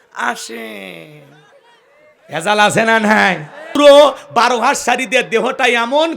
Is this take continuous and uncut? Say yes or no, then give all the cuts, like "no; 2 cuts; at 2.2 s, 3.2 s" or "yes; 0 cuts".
no; 1 cut; at 3.8 s